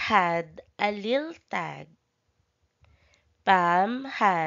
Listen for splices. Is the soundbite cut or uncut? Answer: uncut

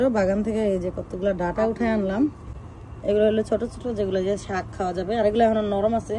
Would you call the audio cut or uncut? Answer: uncut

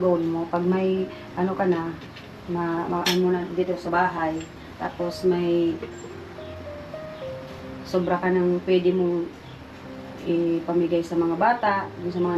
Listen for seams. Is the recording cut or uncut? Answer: uncut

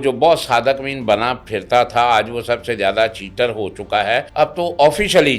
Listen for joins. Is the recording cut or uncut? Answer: cut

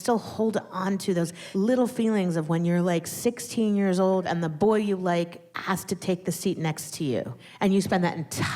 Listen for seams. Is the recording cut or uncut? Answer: cut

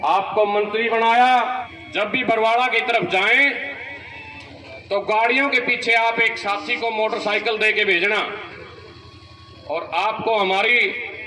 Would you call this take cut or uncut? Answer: cut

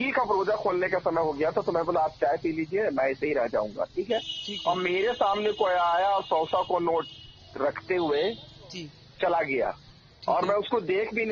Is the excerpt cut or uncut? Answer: uncut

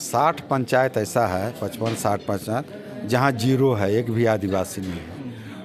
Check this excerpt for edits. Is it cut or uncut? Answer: uncut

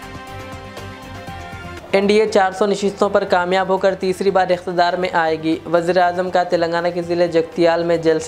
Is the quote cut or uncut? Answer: cut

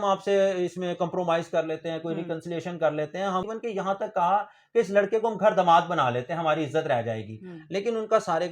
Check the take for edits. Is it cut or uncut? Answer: cut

